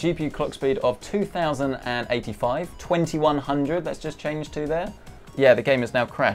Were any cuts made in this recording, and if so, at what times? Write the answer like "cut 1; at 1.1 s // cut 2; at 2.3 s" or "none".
none